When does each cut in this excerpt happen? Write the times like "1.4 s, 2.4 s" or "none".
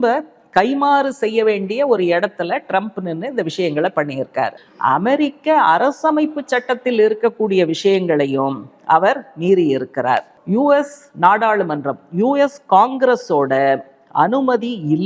4.5 s, 10.3 s